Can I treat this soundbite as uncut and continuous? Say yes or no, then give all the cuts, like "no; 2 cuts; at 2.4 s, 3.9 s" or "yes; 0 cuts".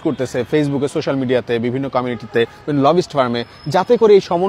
yes; 0 cuts